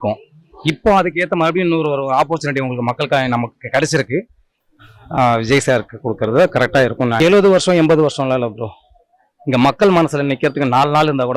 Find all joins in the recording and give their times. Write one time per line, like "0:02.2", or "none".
0:04.6
0:07.2